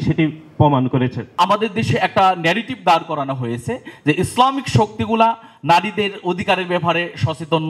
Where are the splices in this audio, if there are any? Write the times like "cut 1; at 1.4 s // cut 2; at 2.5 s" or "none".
cut 1; at 1.4 s